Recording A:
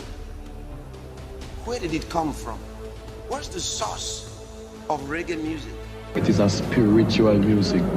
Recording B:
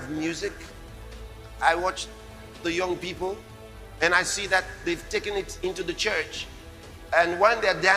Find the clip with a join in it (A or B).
A